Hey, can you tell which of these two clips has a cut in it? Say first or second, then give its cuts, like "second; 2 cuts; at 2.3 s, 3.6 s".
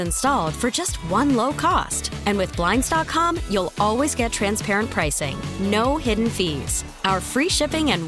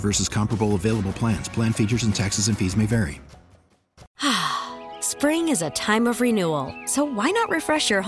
second; 1 cut; at 4.0 s